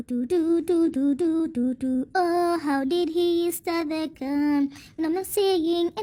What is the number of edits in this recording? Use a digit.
0